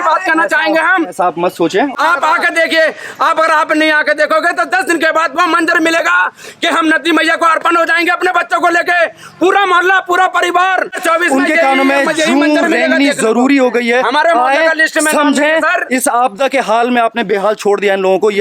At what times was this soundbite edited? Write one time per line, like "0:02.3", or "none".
0:01.9
0:11.0